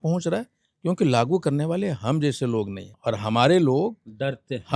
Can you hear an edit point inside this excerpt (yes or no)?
yes